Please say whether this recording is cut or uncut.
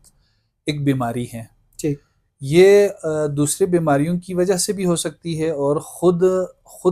uncut